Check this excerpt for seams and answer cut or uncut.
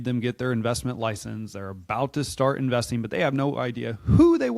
uncut